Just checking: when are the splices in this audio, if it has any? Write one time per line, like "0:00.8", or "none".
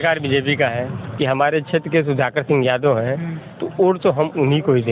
0:01.1